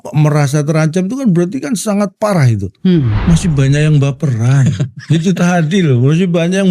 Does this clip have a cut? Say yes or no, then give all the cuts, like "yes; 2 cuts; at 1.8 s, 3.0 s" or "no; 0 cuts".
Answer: yes; 1 cut; at 3.1 s